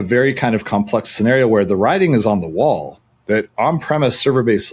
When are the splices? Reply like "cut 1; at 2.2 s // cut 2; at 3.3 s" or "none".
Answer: none

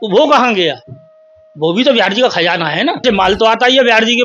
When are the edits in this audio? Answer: cut 1; at 3.0 s

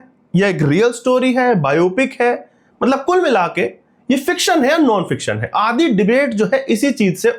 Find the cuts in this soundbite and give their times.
none

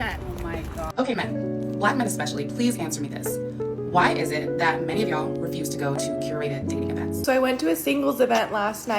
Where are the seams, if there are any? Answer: cut 1; at 0.9 s // cut 2; at 7.2 s

